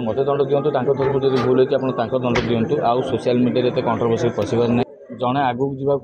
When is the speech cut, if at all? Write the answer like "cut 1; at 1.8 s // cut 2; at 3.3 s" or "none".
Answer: cut 1; at 4.8 s